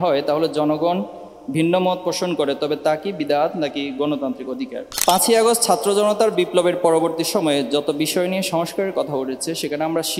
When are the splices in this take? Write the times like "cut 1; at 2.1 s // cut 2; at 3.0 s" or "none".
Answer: cut 1; at 4.9 s